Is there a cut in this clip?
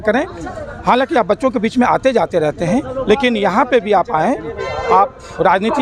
no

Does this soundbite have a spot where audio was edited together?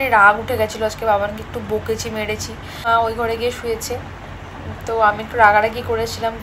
yes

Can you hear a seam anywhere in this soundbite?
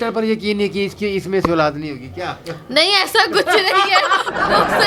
no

